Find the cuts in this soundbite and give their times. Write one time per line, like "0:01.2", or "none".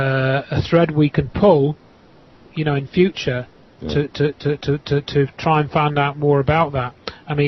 0:03.9